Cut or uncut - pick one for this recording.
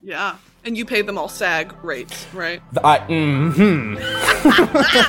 uncut